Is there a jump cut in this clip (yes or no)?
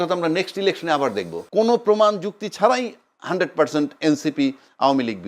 yes